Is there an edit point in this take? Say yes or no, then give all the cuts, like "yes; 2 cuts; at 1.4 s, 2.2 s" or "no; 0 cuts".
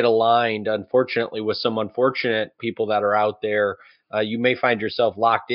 yes; 1 cut; at 2.6 s